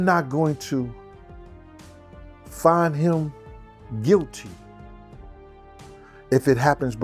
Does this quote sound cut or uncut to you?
cut